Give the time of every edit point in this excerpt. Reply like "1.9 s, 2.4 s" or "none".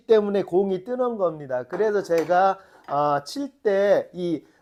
none

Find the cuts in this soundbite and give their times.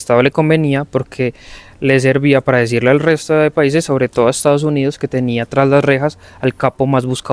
none

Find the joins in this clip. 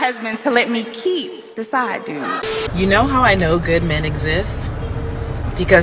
2.6 s

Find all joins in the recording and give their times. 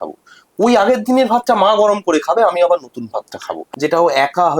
3.6 s

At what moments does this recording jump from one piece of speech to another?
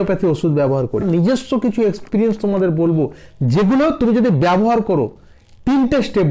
1.0 s

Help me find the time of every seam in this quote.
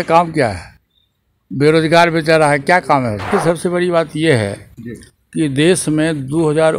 3.3 s

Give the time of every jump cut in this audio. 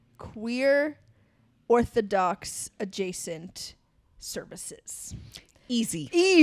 none

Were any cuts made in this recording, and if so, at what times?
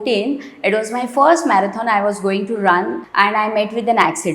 3.0 s

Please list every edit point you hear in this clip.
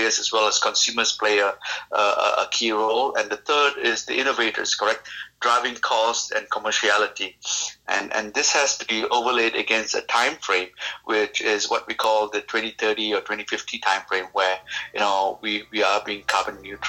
none

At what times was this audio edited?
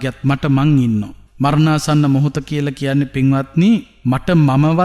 1.2 s, 3.9 s

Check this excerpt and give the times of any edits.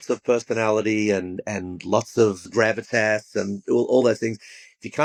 none

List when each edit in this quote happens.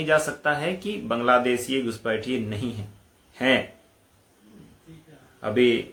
none

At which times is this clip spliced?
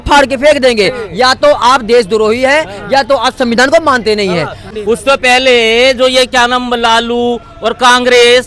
4.6 s

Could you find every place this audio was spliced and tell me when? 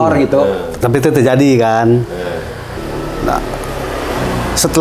2.7 s

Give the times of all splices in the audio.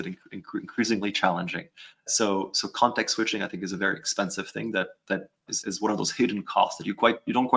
5.4 s

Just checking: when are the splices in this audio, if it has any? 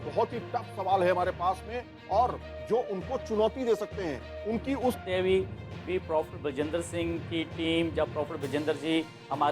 5.0 s

